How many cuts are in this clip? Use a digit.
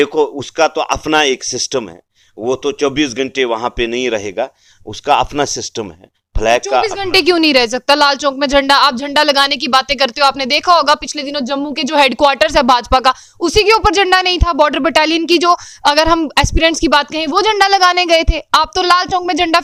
0